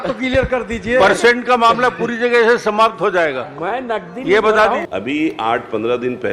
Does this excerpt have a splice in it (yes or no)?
yes